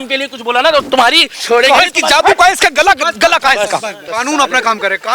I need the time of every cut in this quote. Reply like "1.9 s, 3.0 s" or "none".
1.3 s, 4.0 s